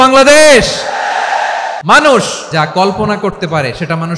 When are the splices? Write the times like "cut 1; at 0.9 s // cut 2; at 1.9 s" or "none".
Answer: cut 1; at 1.8 s // cut 2; at 2.4 s